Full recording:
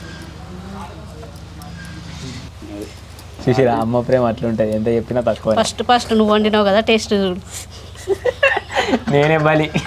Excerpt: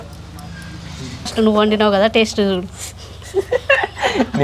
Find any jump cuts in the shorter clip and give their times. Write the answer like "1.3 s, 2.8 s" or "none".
1.3 s